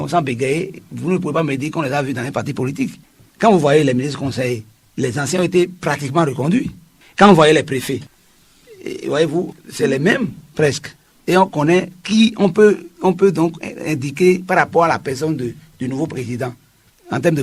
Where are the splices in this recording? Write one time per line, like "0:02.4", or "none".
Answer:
none